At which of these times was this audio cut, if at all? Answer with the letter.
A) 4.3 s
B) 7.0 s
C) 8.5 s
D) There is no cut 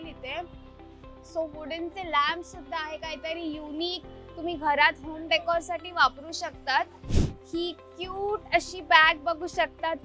B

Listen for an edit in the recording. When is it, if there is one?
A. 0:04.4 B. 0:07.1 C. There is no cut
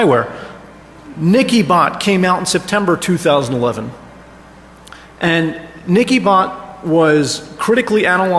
B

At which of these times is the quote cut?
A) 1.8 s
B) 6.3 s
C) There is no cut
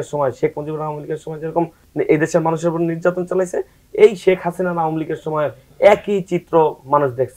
A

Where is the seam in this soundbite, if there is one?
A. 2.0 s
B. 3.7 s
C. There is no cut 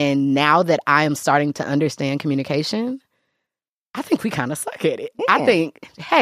C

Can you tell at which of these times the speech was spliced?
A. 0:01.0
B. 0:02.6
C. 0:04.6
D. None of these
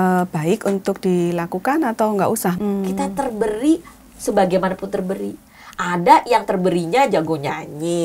B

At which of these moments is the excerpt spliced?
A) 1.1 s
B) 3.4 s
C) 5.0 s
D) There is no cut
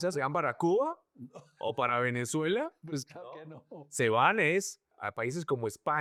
D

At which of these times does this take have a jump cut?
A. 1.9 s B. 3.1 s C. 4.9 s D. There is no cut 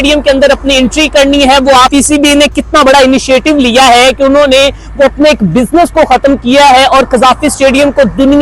A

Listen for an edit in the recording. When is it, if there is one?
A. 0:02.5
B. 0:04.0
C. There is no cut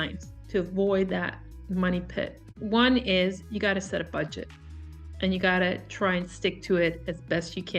A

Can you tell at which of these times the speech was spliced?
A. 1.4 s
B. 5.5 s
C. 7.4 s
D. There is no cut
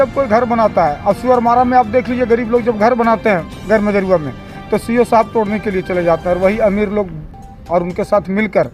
D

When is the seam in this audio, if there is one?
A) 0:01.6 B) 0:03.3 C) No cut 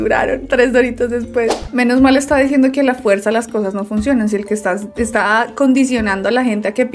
A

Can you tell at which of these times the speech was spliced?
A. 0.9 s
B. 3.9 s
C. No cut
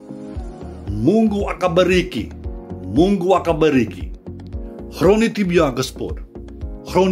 A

